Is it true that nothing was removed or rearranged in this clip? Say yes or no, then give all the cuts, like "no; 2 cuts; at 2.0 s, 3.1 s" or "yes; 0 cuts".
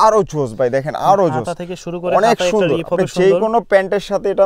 yes; 0 cuts